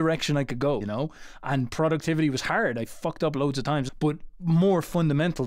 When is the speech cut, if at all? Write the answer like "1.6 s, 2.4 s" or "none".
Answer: 0.9 s, 3.9 s